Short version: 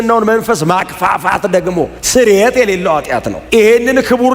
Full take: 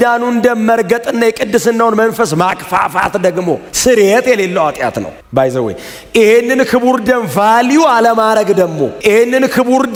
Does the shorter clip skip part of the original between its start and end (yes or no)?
yes